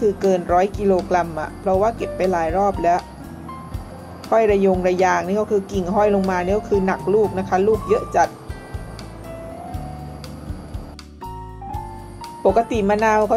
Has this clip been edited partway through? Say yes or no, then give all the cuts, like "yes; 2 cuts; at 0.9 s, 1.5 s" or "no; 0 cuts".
no; 0 cuts